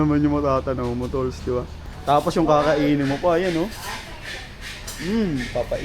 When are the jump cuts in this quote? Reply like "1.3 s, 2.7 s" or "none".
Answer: 1.9 s